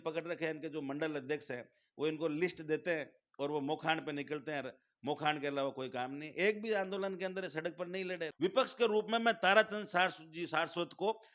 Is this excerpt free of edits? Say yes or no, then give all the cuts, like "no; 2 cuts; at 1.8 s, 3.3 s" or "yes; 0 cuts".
no; 1 cut; at 8.3 s